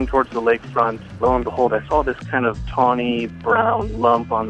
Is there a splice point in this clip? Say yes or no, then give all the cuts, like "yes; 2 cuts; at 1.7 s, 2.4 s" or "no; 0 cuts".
yes; 2 cuts; at 1.1 s, 2.6 s